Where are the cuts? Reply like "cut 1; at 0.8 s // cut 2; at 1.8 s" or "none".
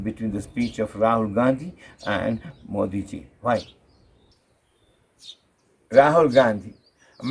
cut 1; at 4.3 s